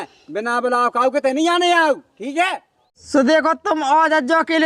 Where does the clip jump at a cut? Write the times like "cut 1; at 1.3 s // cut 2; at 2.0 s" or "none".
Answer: cut 1; at 2.9 s